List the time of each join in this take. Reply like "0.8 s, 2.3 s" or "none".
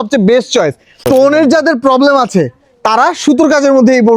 1.1 s